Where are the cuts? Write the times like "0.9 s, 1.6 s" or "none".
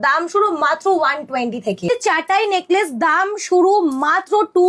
1.9 s

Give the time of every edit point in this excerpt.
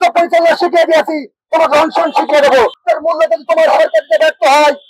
2.8 s

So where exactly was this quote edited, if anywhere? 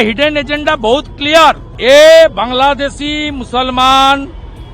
1.7 s

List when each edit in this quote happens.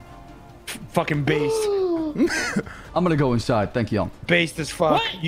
2.8 s

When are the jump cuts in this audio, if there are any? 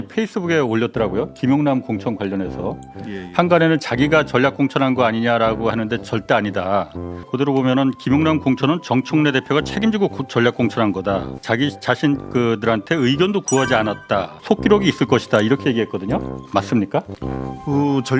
none

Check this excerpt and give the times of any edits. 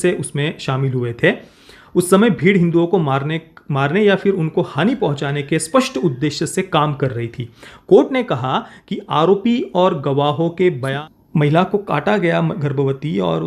10.9 s

